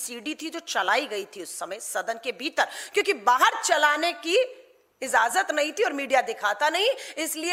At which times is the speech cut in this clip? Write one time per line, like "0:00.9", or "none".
none